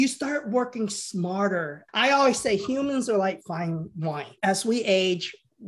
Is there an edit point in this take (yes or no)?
yes